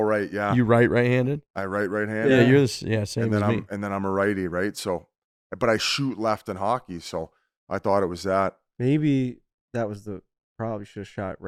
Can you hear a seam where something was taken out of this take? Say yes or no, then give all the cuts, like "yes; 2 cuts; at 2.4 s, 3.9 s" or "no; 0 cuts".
no; 0 cuts